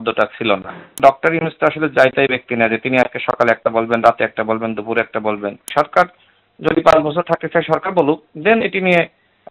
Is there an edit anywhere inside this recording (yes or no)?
yes